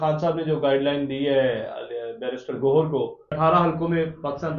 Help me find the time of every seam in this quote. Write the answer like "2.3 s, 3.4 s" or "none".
3.3 s